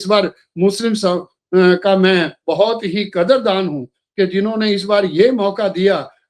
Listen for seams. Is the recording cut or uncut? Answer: uncut